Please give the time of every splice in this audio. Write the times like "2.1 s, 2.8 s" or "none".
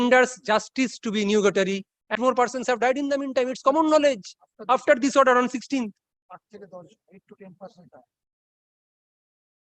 2.1 s